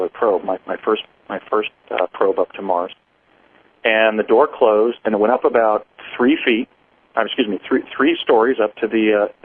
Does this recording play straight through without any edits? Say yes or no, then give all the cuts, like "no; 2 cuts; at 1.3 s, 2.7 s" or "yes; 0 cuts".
no; 1 cut; at 6.6 s